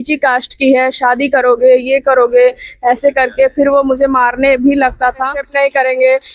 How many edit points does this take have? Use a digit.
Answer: 1